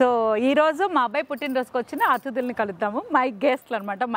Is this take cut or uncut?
uncut